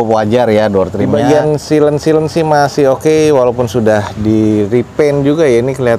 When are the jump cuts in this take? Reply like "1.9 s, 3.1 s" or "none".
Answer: 1.0 s